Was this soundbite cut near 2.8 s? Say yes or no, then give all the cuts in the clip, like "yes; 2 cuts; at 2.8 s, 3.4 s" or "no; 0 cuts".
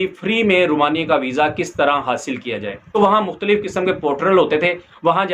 yes; 1 cut; at 2.8 s